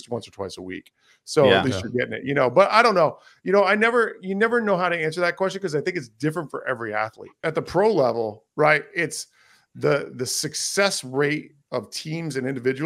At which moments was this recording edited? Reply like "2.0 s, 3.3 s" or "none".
7.4 s

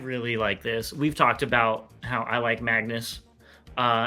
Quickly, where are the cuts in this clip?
none

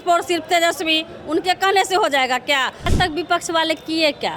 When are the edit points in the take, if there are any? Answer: 2.9 s

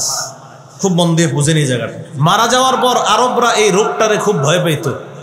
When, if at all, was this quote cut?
2.0 s

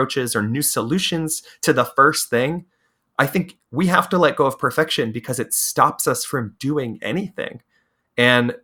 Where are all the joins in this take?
none

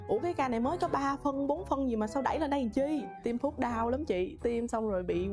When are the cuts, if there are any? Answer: 3.2 s

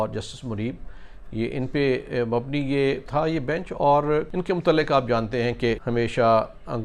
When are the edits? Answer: 3.1 s, 4.3 s, 5.8 s

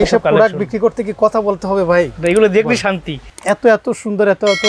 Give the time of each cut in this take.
3.3 s

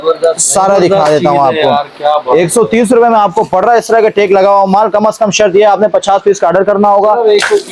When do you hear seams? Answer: none

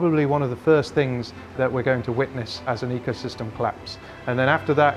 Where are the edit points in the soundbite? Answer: none

